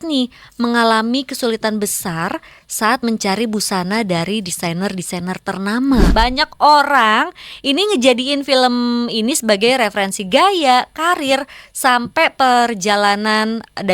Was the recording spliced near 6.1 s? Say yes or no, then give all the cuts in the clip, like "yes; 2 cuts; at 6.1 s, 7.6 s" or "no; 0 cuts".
yes; 1 cut; at 6.1 s